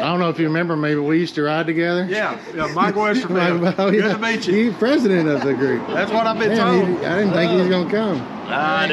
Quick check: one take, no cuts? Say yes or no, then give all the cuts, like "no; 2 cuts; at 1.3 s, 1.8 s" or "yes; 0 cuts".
yes; 0 cuts